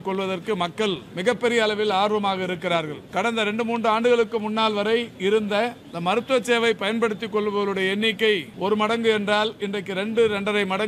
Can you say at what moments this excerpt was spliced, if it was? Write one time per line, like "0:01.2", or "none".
0:01.1
0:03.0
0:05.9
0:08.5